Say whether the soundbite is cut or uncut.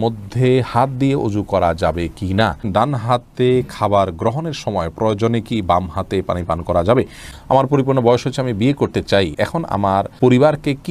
cut